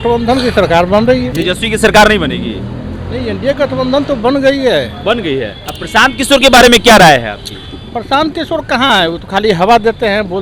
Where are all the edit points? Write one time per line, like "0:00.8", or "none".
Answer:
0:01.3
0:05.6